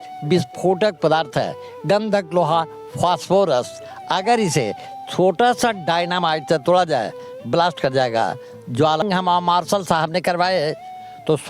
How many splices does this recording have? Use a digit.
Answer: 1